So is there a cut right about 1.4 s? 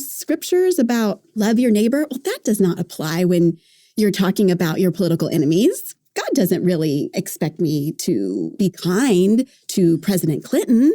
yes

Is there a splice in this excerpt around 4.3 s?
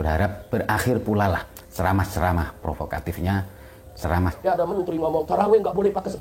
yes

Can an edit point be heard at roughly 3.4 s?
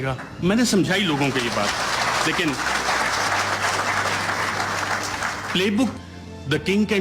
no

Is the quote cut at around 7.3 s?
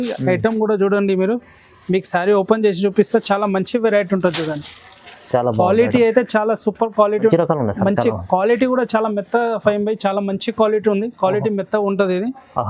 yes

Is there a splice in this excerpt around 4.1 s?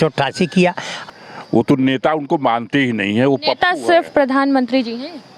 no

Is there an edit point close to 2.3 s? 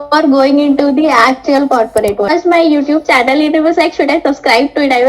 yes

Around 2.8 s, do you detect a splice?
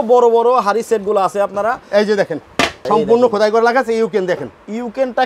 yes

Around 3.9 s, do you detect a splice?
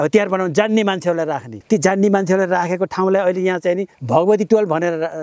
yes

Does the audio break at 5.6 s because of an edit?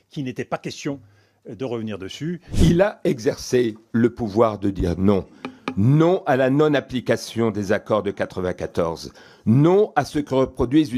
no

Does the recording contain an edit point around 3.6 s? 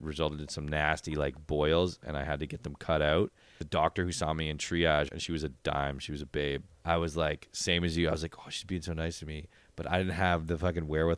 yes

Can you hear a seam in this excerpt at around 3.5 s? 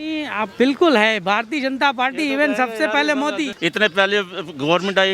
yes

